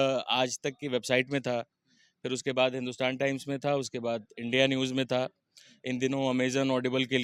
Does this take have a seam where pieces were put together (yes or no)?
no